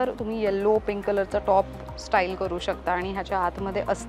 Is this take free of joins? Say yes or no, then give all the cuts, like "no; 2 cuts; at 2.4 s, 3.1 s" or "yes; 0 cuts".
yes; 0 cuts